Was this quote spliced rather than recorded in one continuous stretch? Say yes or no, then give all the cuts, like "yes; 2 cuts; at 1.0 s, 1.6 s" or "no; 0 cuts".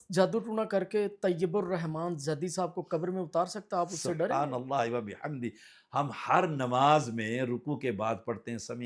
no; 0 cuts